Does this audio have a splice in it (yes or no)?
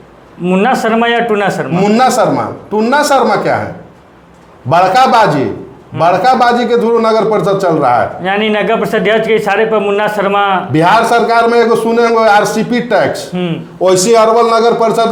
no